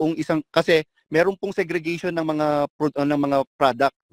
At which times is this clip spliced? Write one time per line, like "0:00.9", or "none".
none